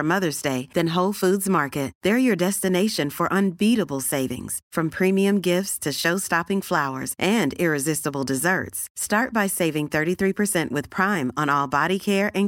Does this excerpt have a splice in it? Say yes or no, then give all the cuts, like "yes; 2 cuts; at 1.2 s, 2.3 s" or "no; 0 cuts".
no; 0 cuts